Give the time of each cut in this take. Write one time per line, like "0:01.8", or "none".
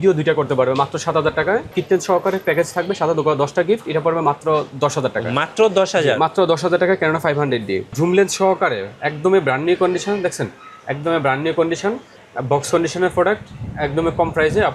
0:01.7
0:07.9